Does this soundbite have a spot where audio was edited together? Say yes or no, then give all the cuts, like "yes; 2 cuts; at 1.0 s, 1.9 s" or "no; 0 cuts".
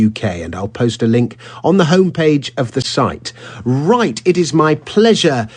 no; 0 cuts